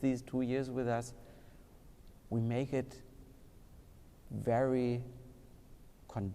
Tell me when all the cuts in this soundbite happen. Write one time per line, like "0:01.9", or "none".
none